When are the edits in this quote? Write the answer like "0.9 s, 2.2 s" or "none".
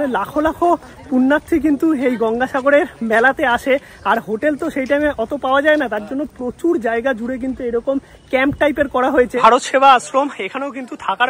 9.3 s